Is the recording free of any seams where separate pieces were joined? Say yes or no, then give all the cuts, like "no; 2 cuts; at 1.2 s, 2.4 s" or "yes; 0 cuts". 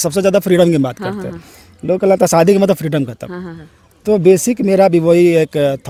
yes; 0 cuts